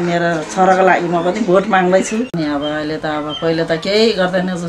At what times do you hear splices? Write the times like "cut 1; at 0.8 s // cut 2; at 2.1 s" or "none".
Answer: cut 1; at 2.3 s